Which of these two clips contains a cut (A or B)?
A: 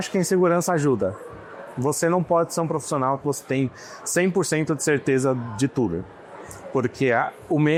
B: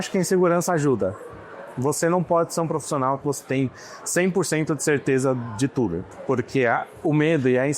B